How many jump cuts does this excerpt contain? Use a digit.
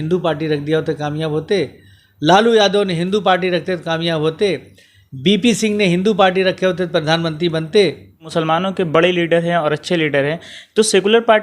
1